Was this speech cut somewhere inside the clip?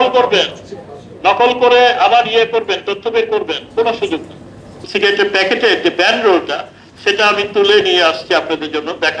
yes; 1 cut; at 4.9 s

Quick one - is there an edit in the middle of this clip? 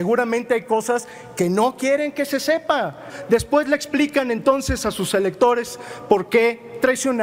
yes; 1 cut; at 3.1 s

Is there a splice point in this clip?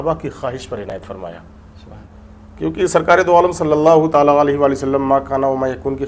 no; 0 cuts

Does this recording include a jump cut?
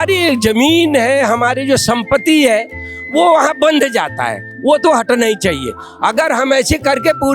yes; 1 cut; at 4.5 s

